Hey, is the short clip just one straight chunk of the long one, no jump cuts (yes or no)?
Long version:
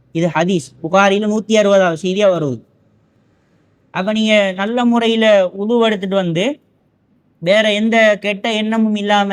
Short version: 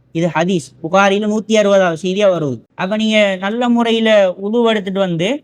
no